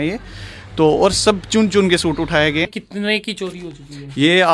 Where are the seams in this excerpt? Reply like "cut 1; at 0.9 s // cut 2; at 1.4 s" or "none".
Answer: cut 1; at 2.7 s